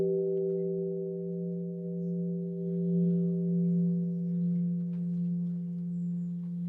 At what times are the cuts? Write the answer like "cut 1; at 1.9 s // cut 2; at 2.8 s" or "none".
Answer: cut 1; at 5.7 s